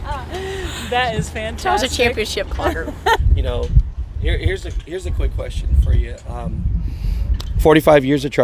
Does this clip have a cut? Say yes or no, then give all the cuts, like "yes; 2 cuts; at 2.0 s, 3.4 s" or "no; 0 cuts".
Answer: yes; 1 cut; at 3.0 s